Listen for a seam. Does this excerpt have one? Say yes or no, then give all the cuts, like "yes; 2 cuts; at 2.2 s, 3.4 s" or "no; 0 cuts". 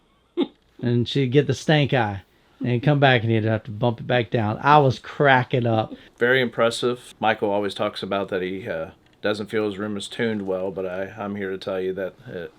yes; 2 cuts; at 6.0 s, 7.1 s